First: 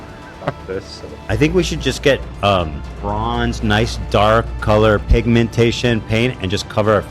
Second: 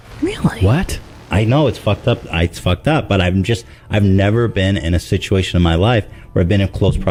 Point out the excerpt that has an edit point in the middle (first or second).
first